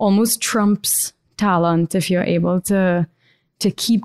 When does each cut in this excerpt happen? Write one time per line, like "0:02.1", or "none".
none